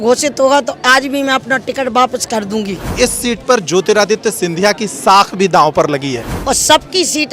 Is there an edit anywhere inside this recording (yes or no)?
yes